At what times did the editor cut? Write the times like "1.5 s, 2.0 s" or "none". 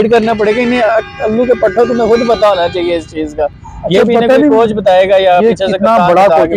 none